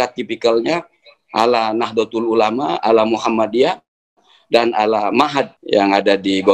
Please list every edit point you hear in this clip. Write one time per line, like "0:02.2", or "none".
0:05.6